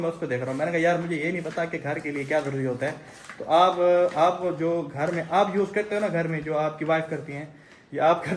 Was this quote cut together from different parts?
no; 0 cuts

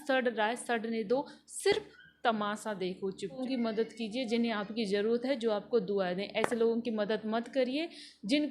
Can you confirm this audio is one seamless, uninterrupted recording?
no; 1 cut; at 3.4 s

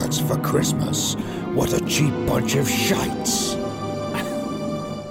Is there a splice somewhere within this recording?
no; 0 cuts

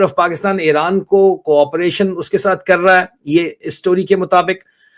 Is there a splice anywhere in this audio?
no; 0 cuts

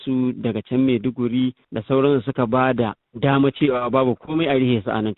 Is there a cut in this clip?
yes; 2 cuts; at 1.7 s, 3.0 s

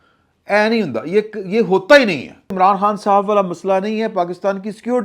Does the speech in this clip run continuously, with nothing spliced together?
no; 1 cut; at 2.5 s

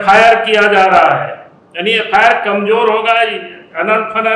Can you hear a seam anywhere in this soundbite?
no; 0 cuts

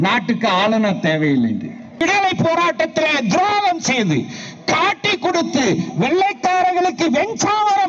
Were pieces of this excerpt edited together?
yes; 1 cut; at 2.0 s

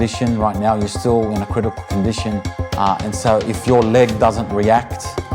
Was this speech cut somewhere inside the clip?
yes; 1 cut; at 2.6 s

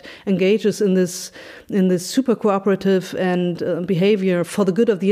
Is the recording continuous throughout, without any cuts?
yes; 0 cuts

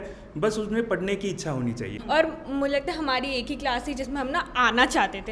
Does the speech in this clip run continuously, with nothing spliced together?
no; 1 cut; at 1.9 s

